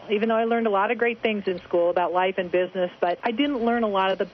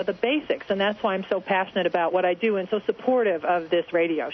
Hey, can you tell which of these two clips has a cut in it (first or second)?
first